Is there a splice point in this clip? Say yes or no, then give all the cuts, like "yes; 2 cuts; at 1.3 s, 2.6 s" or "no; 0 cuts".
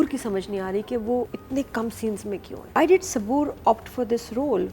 yes; 2 cuts; at 1.4 s, 2.8 s